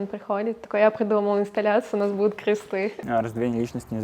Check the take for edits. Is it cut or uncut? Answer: cut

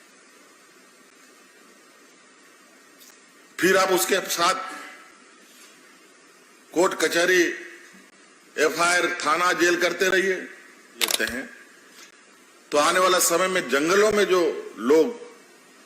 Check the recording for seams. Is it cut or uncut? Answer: cut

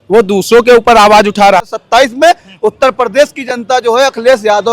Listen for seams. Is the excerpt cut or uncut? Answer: cut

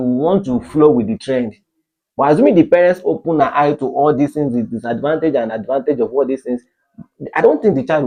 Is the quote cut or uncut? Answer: uncut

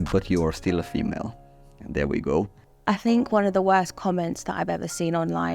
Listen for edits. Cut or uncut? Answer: uncut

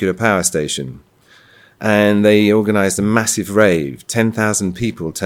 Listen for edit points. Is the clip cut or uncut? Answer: uncut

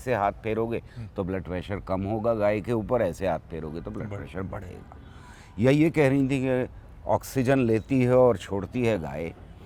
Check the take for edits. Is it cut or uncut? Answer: uncut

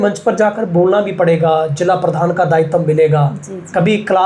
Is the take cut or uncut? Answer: uncut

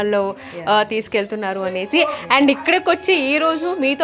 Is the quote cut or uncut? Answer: uncut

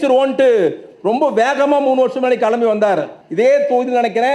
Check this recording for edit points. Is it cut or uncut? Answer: cut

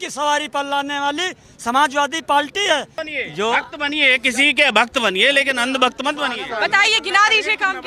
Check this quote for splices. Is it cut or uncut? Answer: cut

